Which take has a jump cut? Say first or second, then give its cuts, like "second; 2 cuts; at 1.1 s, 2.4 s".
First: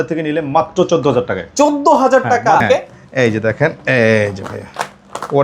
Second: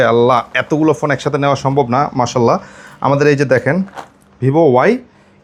first; 1 cut; at 2.6 s